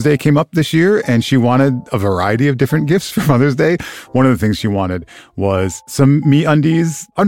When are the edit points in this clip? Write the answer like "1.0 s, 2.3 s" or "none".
none